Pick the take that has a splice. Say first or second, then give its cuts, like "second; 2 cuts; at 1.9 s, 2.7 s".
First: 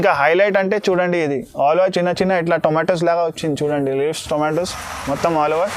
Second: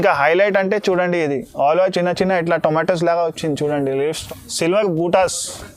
second; 1 cut; at 4.2 s